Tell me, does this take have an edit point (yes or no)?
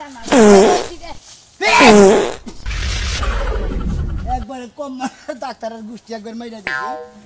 no